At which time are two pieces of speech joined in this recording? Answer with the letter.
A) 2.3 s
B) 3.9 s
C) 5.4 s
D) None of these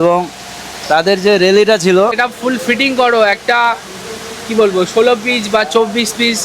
A